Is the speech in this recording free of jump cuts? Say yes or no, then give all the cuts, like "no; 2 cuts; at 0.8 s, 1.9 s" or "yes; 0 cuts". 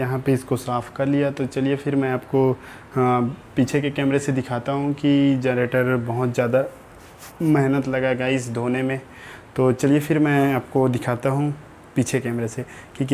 yes; 0 cuts